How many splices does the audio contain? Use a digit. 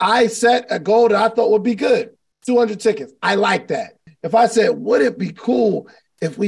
1